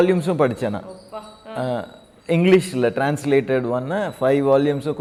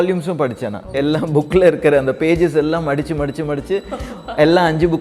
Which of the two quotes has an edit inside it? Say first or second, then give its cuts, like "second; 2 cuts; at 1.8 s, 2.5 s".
second; 1 cut; at 0.9 s